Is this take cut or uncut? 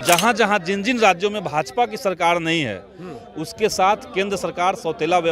uncut